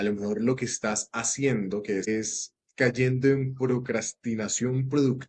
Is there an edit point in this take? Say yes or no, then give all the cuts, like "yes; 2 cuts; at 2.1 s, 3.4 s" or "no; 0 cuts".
yes; 1 cut; at 2.1 s